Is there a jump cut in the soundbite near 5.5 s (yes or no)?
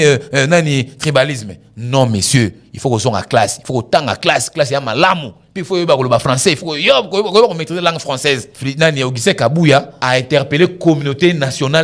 no